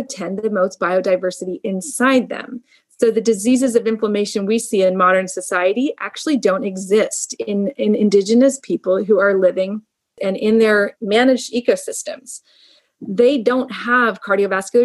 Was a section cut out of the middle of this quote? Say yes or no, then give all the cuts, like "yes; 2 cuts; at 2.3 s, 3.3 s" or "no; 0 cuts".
yes; 2 cuts; at 10.1 s, 11.0 s